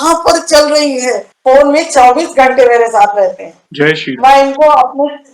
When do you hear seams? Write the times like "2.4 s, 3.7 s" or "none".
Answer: 1.3 s